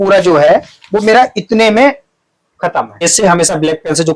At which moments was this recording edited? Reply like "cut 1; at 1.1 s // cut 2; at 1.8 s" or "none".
cut 1; at 2.9 s